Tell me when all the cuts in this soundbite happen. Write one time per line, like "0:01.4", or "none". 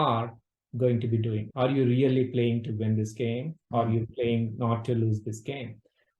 0:01.4